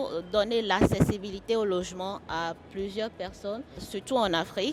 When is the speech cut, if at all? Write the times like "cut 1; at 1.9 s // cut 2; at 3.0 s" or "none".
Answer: cut 1; at 3.8 s